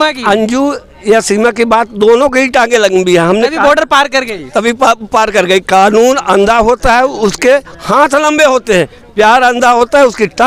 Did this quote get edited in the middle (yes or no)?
no